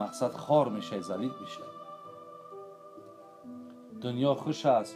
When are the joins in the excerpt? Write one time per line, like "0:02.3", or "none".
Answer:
0:01.7
0:03.8